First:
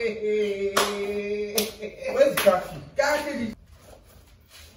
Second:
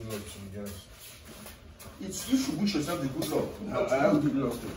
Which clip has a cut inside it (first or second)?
first